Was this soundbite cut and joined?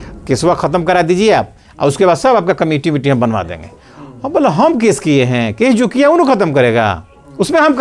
no; 0 cuts

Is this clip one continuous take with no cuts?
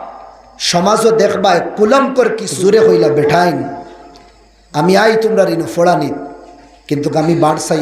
no; 1 cut; at 2.6 s

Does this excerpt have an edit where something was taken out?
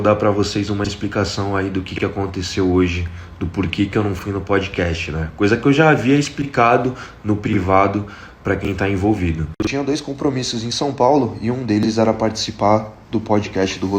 no; 0 cuts

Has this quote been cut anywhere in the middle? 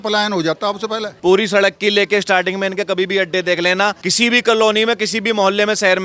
yes; 2 cuts; at 1.1 s, 4.0 s

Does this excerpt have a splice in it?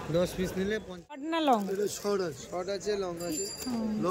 yes; 1 cut; at 1.2 s

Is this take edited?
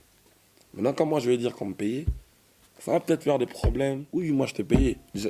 yes; 1 cut; at 4.0 s

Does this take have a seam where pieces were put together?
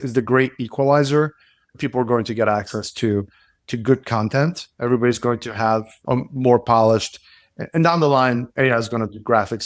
yes; 1 cut; at 6.0 s

